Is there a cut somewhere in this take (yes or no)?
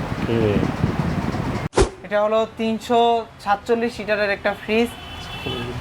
yes